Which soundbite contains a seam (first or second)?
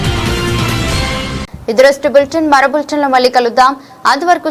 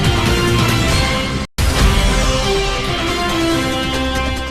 second